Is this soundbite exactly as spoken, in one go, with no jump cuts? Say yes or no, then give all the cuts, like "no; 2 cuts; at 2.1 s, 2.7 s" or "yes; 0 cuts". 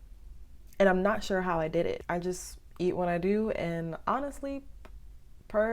no; 1 cut; at 2.0 s